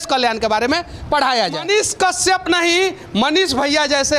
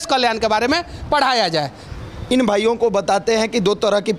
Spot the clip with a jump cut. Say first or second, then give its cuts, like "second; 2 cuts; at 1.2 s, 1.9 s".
first; 1 cut; at 1.6 s